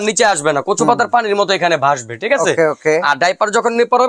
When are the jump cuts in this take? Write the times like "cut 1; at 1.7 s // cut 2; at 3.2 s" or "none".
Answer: none